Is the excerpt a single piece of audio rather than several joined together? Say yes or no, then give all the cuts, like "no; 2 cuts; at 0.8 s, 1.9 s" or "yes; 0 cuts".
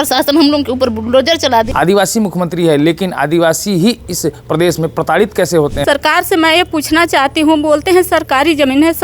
no; 2 cuts; at 1.7 s, 5.8 s